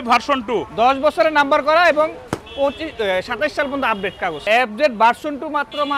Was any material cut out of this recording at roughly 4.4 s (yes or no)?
yes